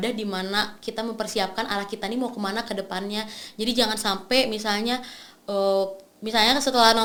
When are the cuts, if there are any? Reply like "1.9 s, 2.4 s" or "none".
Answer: none